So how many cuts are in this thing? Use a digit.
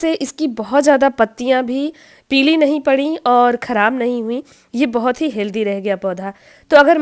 0